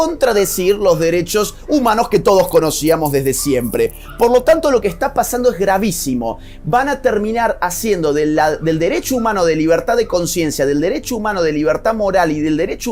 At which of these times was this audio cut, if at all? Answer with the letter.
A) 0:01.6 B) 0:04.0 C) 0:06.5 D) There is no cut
D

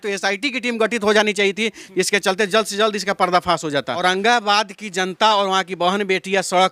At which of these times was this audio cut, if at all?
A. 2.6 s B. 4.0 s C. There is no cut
B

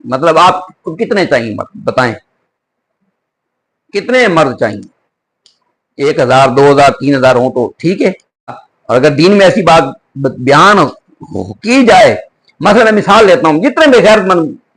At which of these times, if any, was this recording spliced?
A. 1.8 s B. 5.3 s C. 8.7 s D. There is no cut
C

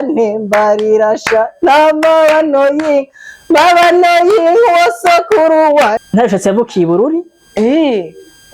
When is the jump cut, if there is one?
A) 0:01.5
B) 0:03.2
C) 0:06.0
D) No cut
C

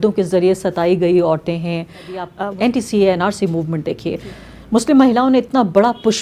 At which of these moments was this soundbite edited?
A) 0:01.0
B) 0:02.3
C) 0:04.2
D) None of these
B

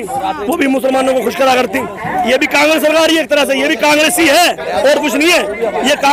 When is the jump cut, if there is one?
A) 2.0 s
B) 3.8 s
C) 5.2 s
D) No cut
D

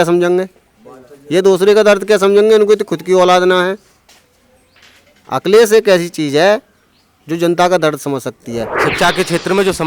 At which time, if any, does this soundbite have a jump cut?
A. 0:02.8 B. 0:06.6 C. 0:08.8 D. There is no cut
C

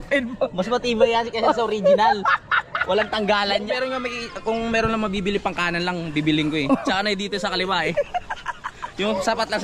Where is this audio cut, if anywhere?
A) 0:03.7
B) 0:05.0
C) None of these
A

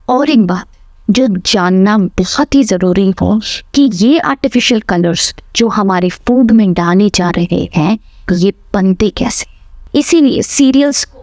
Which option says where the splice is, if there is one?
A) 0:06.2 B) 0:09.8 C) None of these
B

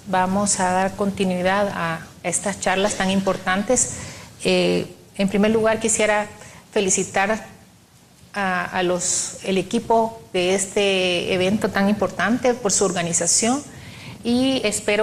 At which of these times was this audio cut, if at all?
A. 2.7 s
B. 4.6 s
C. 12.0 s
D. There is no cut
B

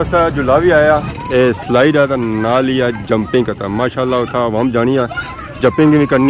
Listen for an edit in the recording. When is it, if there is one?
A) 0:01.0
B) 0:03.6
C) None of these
A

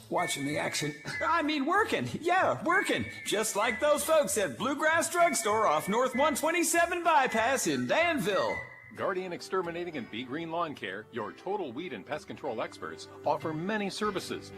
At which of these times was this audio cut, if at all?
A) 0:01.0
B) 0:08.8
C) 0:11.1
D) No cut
B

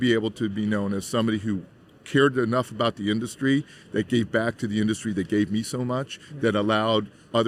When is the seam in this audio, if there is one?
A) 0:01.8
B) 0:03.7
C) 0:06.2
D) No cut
D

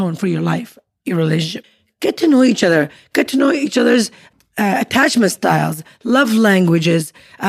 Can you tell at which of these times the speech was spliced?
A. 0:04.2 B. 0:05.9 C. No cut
A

